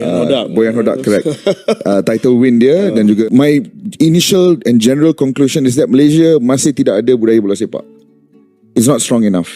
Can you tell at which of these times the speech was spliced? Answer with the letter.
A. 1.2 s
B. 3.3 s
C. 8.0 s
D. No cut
B